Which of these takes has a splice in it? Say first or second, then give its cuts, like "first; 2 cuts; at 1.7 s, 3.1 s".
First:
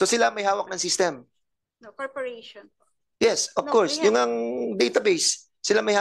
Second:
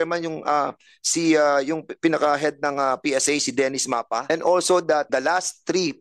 second; 2 cuts; at 4.2 s, 5.1 s